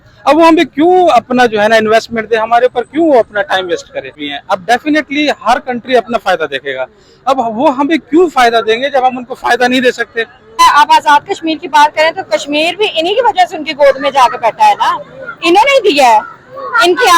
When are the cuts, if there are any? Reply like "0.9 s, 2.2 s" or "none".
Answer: 4.1 s, 10.6 s

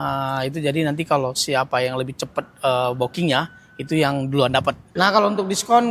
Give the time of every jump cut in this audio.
4.9 s

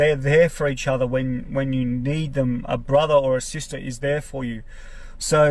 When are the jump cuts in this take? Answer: none

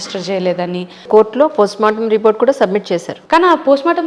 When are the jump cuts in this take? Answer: 1.0 s, 3.1 s

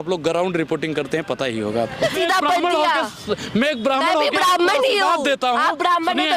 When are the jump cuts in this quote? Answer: 2.0 s

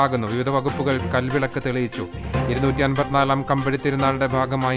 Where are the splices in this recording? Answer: 3.4 s

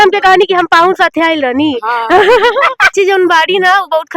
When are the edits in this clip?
2.9 s

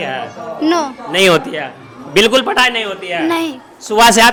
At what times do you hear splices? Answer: none

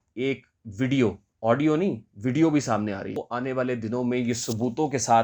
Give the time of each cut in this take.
1.3 s, 3.3 s

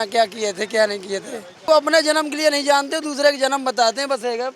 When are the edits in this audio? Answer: 1.7 s

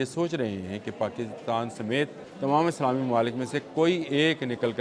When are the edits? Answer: 2.2 s

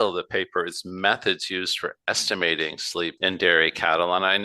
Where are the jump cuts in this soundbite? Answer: 3.1 s

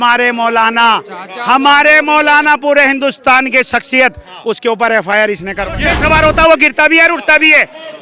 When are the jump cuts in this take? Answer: 5.8 s

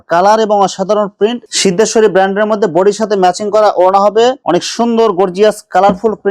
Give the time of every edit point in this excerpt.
1.5 s, 4.4 s

